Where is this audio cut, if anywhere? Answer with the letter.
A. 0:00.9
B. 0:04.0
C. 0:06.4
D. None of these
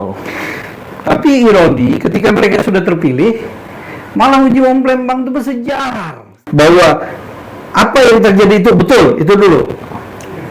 C